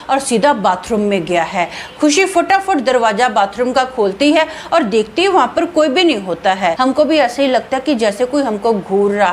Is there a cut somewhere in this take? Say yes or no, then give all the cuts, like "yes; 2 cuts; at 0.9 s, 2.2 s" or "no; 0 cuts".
yes; 1 cut; at 6.8 s